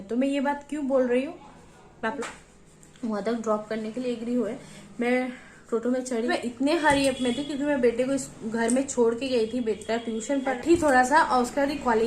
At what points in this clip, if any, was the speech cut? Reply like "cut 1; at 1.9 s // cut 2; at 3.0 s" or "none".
cut 1; at 2.2 s // cut 2; at 6.3 s // cut 3; at 10.6 s